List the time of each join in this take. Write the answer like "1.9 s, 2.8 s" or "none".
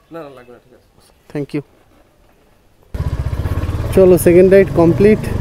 none